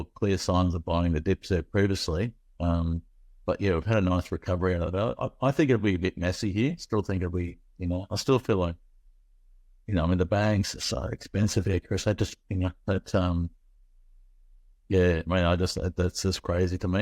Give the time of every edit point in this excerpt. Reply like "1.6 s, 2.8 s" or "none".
none